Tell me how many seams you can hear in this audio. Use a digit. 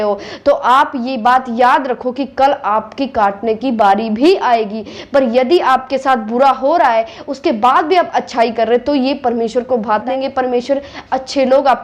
1